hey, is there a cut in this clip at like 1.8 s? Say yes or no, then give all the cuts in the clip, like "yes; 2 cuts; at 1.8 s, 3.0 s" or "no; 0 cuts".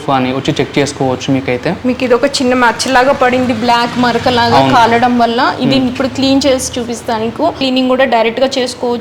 yes; 2 cuts; at 1.8 s, 7.6 s